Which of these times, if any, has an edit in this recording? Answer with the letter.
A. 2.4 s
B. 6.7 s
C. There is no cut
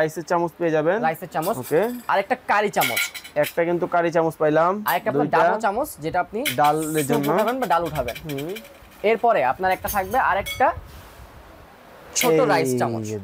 C